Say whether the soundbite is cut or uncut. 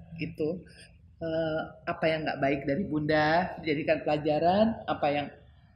uncut